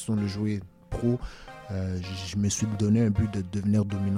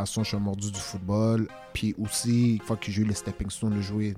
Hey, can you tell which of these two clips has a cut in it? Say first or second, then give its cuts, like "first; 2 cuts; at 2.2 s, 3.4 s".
second; 2 cuts; at 1.6 s, 2.6 s